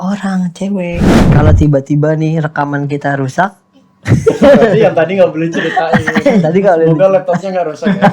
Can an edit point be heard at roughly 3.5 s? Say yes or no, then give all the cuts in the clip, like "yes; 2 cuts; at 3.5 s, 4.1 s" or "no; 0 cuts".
no; 1 cut; at 1.2 s